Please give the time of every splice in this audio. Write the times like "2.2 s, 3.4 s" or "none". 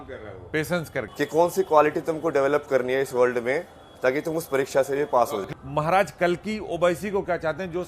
5.5 s